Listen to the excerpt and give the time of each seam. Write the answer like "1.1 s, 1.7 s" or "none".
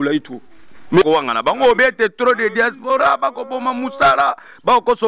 1.0 s